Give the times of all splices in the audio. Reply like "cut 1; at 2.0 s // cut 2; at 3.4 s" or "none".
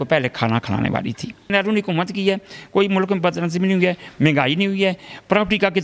cut 1; at 1.5 s